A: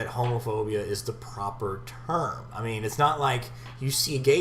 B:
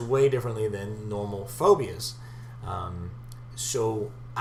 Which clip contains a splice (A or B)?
A